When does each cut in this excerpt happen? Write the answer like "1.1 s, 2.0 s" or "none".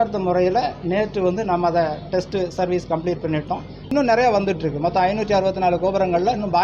3.9 s